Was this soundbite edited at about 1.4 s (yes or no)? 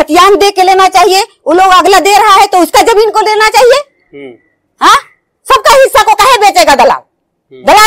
no